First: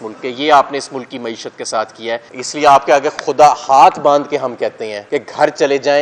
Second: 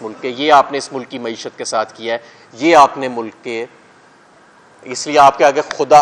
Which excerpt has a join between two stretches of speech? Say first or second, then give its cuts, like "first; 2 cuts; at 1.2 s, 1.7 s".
first; 2 cuts; at 2.3 s, 4.9 s